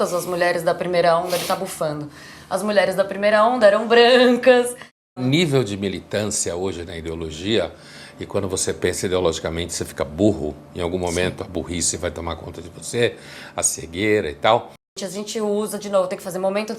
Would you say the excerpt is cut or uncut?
cut